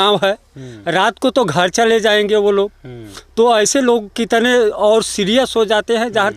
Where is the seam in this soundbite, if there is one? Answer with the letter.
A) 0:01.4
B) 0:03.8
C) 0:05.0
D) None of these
D